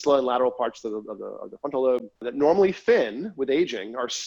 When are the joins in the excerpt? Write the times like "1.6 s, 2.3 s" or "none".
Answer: none